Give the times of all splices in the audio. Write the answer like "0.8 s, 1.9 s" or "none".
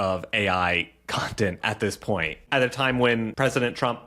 2.4 s, 3.3 s

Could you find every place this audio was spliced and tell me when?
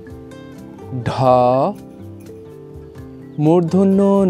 0.9 s, 1.8 s, 3.4 s

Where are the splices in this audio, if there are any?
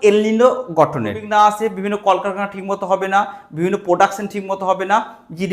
1.2 s

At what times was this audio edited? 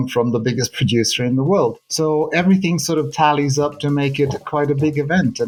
none

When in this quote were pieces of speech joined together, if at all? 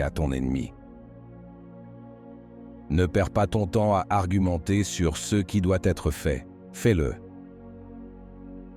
none

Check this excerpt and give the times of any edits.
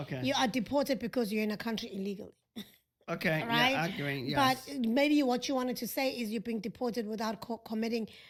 none

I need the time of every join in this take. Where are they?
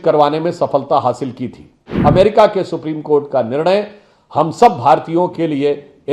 1.8 s

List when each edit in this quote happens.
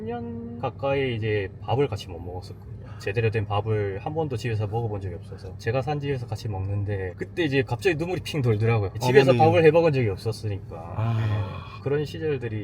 5.5 s, 8.9 s

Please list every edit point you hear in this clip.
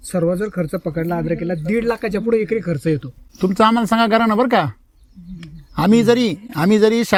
none

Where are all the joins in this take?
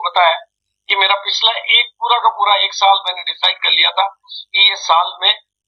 none

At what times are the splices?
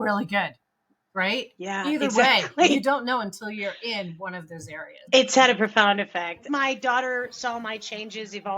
5.0 s, 6.4 s

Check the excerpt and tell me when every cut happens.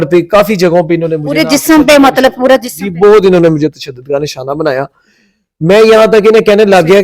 none

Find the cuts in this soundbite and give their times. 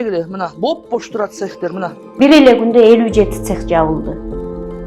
2.0 s

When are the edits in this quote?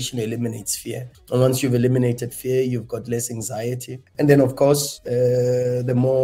none

